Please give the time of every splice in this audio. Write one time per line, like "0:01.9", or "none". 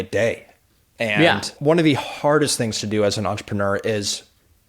0:01.5